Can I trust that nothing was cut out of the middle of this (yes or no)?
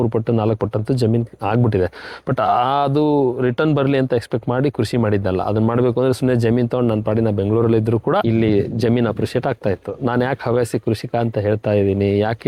no